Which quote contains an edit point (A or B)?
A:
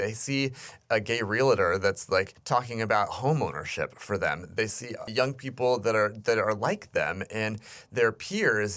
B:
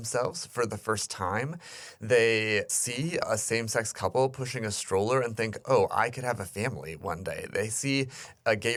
A